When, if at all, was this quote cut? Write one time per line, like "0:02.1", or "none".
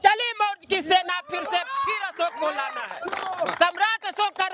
none